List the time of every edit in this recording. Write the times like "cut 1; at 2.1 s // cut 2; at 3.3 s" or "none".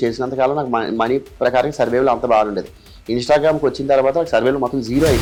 none